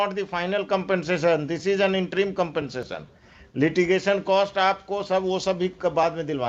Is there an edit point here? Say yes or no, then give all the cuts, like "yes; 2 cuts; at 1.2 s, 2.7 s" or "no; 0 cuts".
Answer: no; 0 cuts